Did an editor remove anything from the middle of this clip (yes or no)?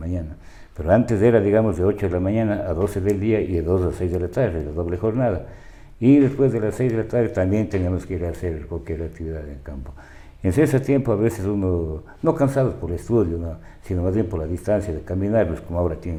no